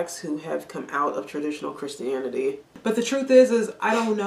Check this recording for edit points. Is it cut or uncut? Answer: cut